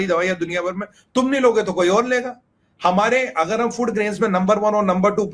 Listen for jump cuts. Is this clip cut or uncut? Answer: uncut